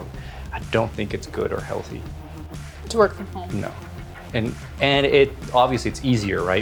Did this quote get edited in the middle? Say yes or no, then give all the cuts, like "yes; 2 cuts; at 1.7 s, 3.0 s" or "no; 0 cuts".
no; 0 cuts